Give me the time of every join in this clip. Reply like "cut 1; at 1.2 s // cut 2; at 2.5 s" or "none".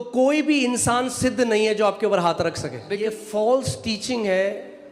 cut 1; at 3.0 s